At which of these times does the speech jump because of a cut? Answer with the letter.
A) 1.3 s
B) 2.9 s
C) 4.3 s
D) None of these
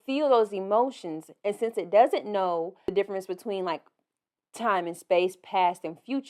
B